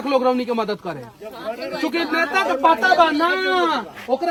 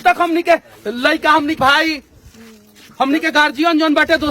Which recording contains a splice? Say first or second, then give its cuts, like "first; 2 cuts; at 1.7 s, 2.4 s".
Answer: second; 1 cut; at 1.6 s